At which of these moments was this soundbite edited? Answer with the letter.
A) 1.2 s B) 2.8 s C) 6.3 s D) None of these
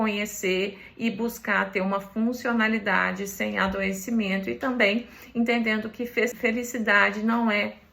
C